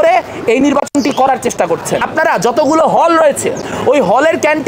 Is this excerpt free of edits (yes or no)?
no